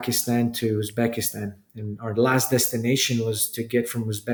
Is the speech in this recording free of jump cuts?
yes; 0 cuts

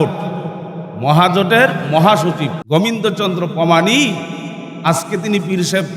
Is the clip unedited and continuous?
no; 1 cut; at 2.6 s

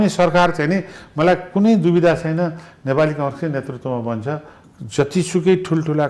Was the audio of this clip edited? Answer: yes; 1 cut; at 4.5 s

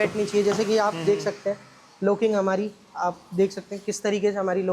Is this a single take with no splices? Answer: yes; 0 cuts

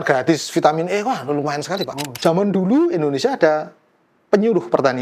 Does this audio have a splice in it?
yes; 1 cut; at 2.0 s

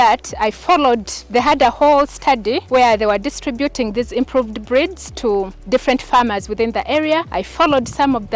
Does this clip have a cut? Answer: yes; 4 cuts; at 1.2 s, 2.6 s, 5.6 s, 7.4 s

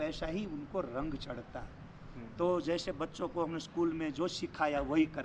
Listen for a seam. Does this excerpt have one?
no; 0 cuts

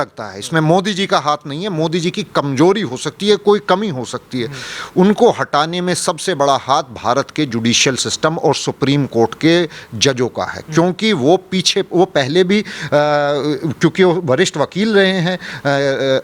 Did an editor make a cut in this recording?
no; 0 cuts

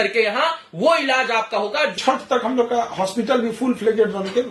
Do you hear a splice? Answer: yes; 1 cut; at 2.0 s

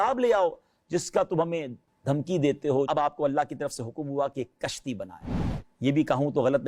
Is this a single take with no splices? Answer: no; 1 cut; at 2.9 s

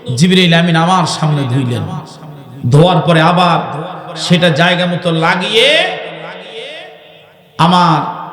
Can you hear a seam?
no; 0 cuts

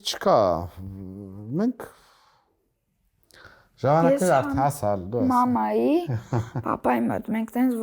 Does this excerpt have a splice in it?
no; 0 cuts

